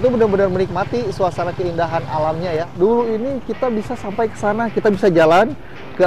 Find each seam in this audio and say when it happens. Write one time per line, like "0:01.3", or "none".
0:02.7